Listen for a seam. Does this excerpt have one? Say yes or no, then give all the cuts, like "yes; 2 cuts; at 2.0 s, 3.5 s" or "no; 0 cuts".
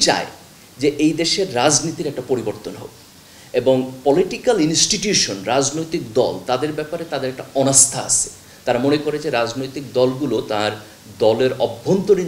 no; 0 cuts